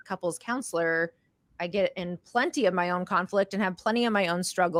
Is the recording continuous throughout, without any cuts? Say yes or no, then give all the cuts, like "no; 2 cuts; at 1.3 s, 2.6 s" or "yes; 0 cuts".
yes; 0 cuts